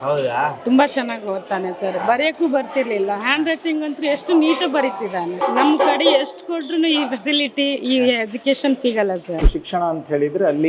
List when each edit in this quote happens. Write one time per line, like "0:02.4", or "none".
0:05.4
0:09.4